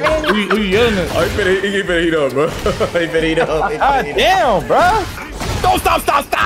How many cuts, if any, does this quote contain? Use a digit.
1